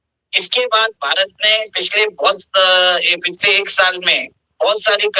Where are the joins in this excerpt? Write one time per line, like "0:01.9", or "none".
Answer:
none

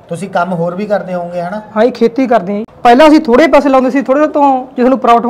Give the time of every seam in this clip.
0:02.7

